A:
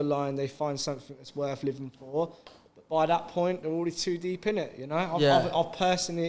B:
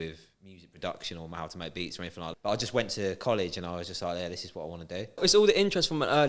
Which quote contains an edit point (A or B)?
B